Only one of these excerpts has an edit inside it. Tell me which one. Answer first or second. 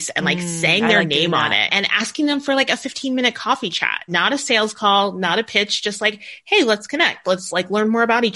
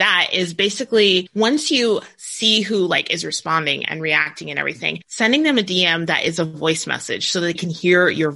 second